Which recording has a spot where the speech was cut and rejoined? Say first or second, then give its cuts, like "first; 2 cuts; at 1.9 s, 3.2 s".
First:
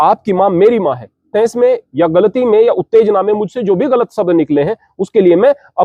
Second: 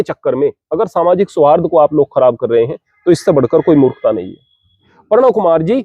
second; 1 cut; at 4.9 s